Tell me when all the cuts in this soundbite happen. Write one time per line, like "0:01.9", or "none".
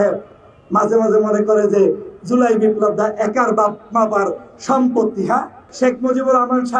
0:05.6